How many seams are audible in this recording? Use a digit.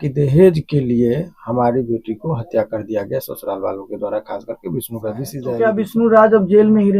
1